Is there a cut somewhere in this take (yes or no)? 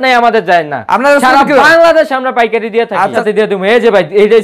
yes